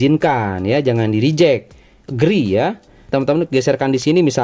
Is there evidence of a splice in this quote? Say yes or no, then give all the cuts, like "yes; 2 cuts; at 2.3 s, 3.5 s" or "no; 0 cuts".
yes; 1 cut; at 3.1 s